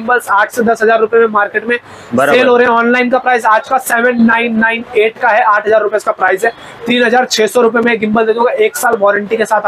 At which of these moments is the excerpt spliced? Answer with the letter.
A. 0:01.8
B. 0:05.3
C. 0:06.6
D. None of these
D